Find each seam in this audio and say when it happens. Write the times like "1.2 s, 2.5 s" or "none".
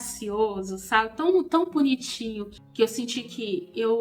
2.5 s